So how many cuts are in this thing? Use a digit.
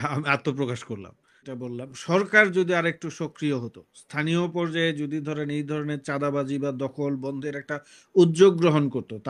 1